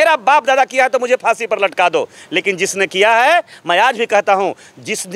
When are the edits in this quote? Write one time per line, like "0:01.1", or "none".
none